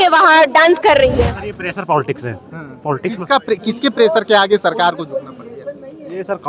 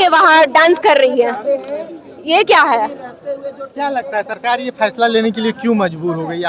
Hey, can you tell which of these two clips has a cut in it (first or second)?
first